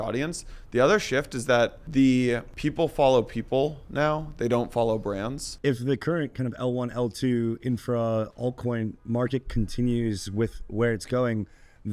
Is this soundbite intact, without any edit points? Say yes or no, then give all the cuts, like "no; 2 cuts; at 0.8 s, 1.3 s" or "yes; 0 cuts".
no; 3 cuts; at 1.8 s, 2.5 s, 5.5 s